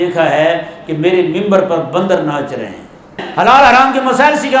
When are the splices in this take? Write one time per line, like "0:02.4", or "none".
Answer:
0:03.2

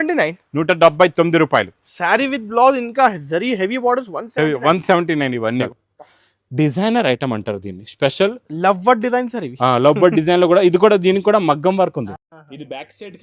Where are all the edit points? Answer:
0:05.7

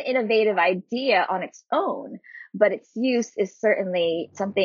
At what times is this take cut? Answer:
none

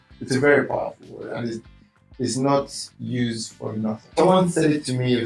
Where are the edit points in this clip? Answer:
0:04.2

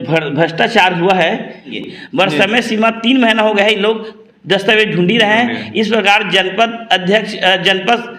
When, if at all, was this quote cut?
0:01.7

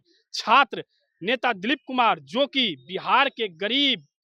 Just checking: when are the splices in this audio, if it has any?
none

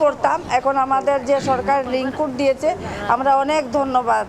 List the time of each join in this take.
none

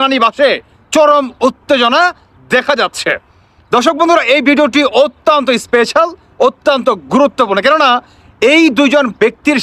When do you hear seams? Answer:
none

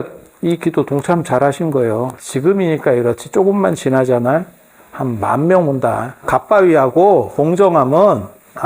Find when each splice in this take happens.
0:02.2
0:06.2
0:07.3

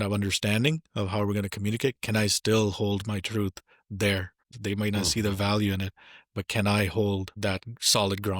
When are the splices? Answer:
0:04.5
0:07.3

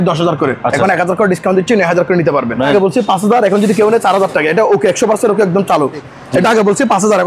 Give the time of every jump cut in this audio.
0:02.6
0:06.1

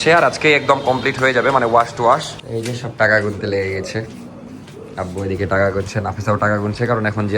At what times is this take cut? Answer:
0:02.4

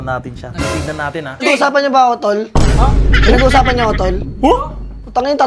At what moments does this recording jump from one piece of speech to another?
0:01.4

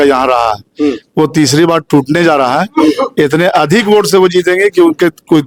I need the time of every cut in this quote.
none

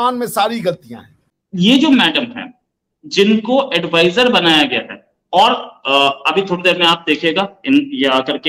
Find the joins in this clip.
0:01.4

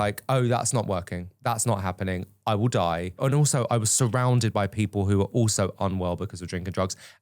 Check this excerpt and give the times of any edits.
0:03.2

